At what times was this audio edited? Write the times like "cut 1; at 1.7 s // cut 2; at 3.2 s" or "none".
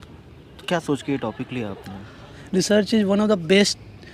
cut 1; at 2.3 s